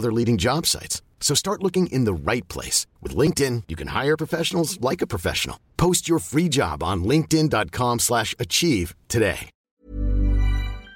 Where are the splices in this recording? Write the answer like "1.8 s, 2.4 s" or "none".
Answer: 9.5 s